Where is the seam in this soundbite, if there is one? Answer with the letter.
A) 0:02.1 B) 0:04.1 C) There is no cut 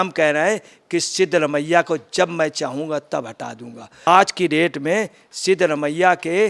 B